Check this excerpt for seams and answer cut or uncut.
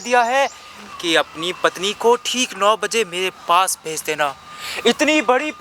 uncut